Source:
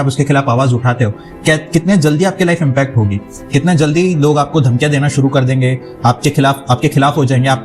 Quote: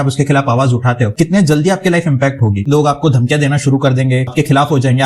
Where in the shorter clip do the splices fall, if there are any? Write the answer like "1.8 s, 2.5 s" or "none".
1.1 s, 2.7 s, 4.3 s